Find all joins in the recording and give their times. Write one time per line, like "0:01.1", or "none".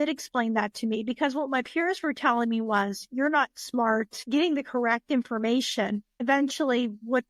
0:04.2
0:06.1

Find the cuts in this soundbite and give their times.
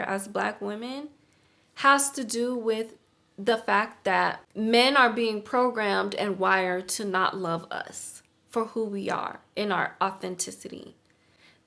none

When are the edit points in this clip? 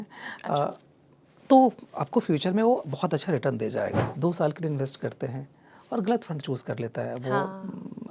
0:04.1

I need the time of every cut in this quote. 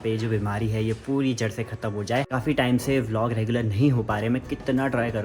0:02.3

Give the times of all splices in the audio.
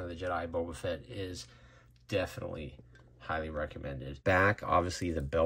0:04.2

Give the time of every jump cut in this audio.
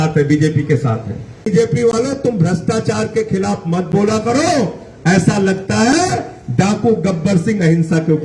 0:01.5

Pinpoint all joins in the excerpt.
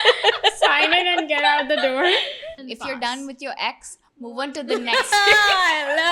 0:02.6

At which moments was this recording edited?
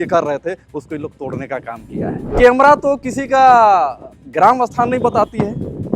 0:02.3

